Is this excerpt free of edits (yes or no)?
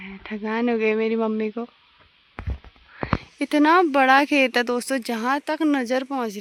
yes